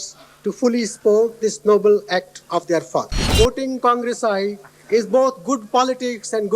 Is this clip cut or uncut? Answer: cut